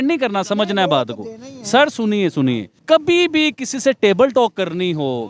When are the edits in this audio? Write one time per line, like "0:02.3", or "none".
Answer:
0:02.7